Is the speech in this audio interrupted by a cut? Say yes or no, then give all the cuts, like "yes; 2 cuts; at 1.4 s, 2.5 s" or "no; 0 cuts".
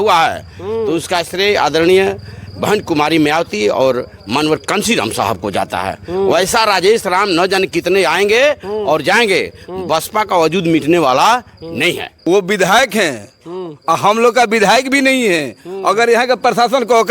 yes; 1 cut; at 12.1 s